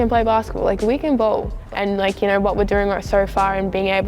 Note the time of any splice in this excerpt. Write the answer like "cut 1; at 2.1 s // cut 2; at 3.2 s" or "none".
none